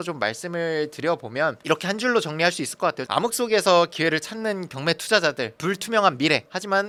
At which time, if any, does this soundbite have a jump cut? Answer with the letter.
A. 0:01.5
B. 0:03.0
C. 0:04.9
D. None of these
D